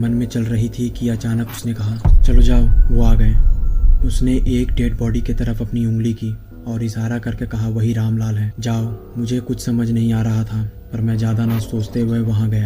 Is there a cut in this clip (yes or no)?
no